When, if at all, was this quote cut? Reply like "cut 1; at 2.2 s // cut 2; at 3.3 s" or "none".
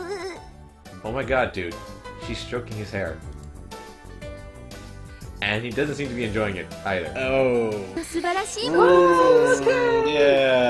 cut 1; at 0.9 s // cut 2; at 7.9 s